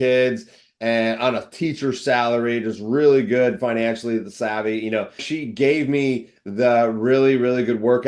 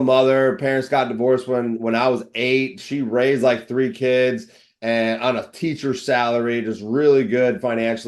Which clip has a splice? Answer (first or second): first